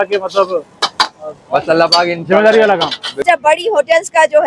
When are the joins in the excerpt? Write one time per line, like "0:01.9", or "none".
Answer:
0:03.2

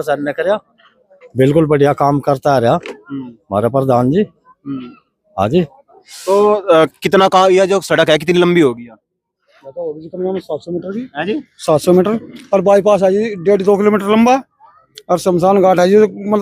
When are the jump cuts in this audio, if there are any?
none

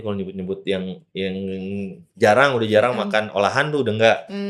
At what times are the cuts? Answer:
none

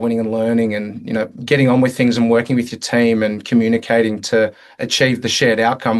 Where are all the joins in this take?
none

